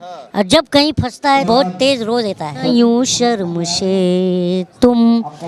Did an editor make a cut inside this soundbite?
yes; 2 cuts; at 1.4 s, 2.7 s

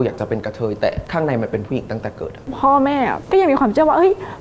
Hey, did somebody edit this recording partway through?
yes; 1 cut; at 2.5 s

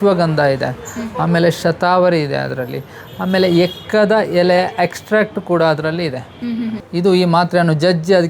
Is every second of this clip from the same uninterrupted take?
no; 1 cut; at 6.8 s

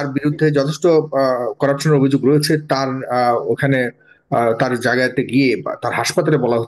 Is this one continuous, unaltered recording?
yes; 0 cuts

